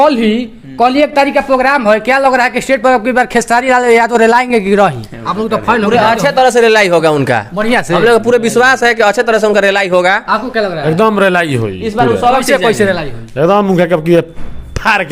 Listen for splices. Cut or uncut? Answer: uncut